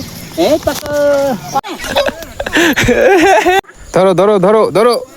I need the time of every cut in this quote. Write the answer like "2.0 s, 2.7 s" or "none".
1.6 s, 3.6 s